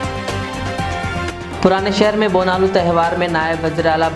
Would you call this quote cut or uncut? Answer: cut